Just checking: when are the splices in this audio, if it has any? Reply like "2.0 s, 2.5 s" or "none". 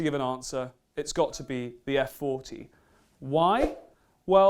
2.0 s